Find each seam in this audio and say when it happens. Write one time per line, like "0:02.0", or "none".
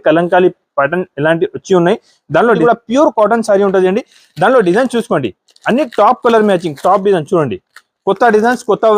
0:02.6